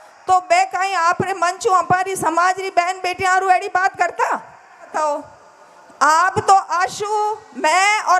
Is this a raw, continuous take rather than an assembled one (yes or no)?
no